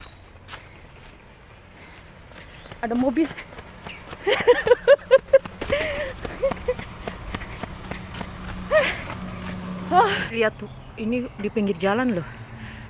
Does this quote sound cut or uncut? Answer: cut